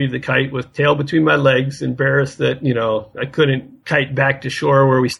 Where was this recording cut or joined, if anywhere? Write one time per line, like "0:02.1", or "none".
0:03.7

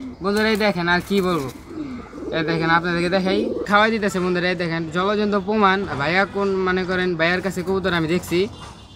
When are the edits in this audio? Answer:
0:03.7

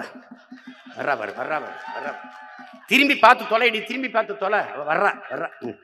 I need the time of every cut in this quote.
none

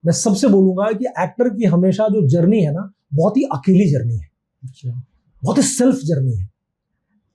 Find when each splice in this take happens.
none

